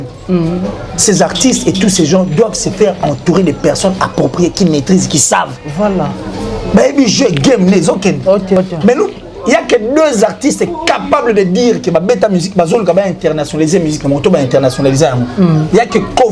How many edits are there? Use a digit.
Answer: 1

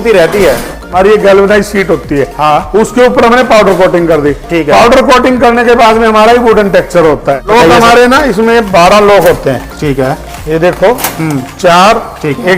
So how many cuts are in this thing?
2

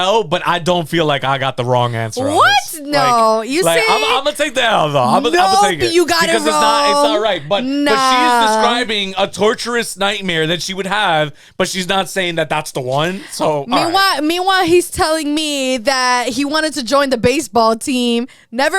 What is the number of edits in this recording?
0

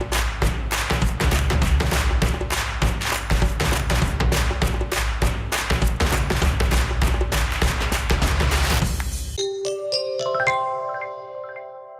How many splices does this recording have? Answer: 1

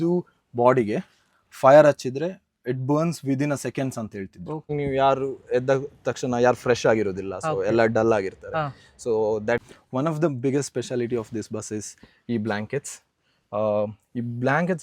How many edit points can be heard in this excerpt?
2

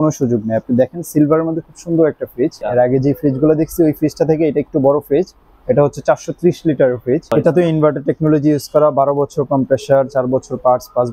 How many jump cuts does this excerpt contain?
2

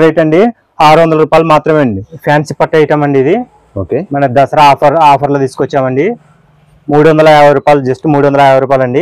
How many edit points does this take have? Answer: 1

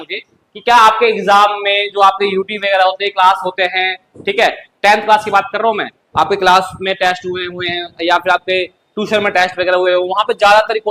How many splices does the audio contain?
0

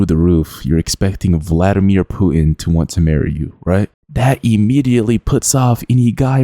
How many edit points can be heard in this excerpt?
1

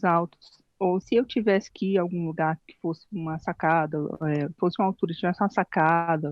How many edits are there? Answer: 3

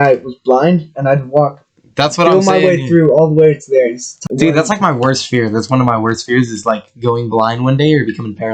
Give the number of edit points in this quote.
1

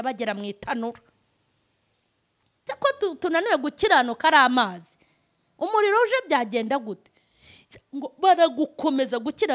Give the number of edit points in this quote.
1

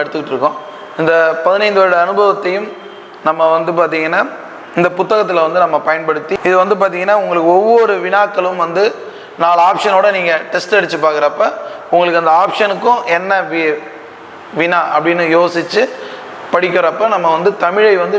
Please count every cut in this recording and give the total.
1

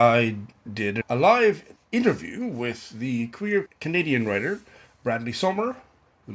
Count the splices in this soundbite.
3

